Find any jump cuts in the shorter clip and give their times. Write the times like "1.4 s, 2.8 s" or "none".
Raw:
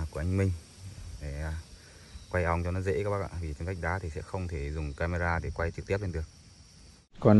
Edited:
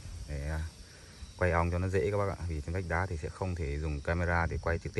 none